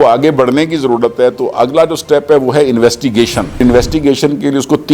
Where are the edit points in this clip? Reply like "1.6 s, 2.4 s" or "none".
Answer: 3.6 s